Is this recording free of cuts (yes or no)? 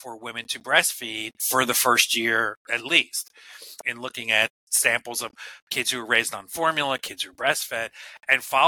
no